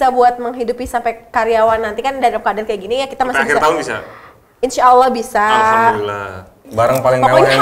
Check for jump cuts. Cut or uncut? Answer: cut